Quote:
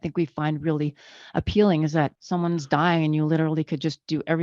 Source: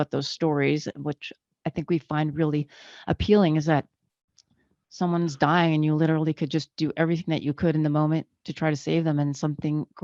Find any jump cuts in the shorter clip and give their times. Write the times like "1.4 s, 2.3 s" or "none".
2.2 s